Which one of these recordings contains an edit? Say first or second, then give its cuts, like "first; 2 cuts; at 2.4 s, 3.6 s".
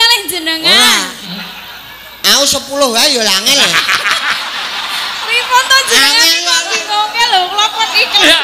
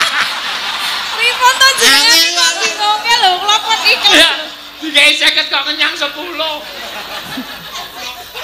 first; 1 cut; at 1.2 s